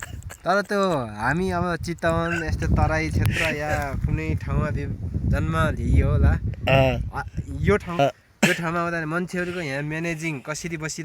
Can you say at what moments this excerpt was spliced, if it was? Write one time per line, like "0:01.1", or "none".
0:08.0